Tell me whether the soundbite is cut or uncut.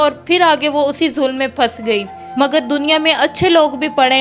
cut